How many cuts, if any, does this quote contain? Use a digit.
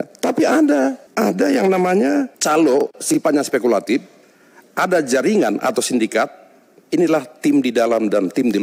0